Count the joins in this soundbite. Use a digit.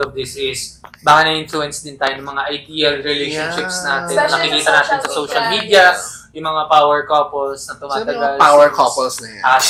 0